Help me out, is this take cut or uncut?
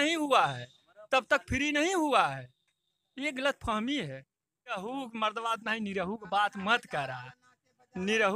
cut